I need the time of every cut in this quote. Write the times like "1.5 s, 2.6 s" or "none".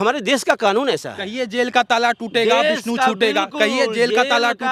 none